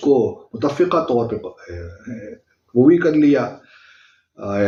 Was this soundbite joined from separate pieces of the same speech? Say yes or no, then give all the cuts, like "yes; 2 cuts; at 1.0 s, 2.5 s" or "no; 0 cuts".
no; 0 cuts